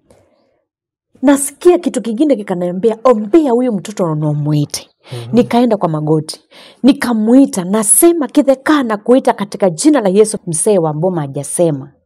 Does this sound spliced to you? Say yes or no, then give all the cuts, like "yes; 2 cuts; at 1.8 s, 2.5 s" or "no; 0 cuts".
yes; 1 cut; at 10.3 s